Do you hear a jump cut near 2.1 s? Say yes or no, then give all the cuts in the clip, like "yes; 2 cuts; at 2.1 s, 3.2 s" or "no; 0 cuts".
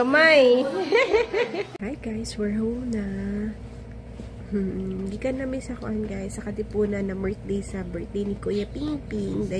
yes; 1 cut; at 2.1 s